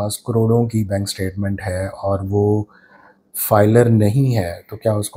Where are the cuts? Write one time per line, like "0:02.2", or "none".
none